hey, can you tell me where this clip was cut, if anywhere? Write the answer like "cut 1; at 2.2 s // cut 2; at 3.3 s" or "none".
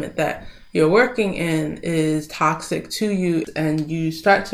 cut 1; at 3.5 s